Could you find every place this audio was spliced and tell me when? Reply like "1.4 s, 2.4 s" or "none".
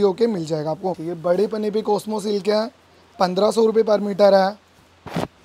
1.1 s